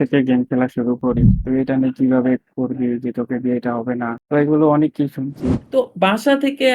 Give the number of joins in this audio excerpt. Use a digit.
2